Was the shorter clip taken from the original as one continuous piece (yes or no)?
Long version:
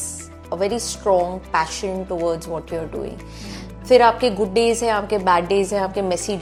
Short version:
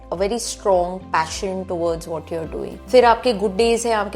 no